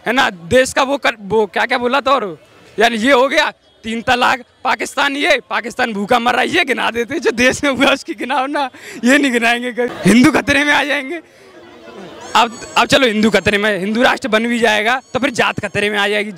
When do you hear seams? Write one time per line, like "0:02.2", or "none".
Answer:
0:09.9